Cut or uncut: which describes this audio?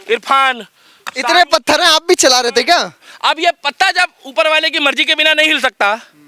cut